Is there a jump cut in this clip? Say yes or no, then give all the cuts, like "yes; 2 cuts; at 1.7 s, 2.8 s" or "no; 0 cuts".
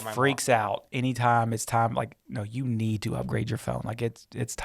yes; 1 cut; at 2.2 s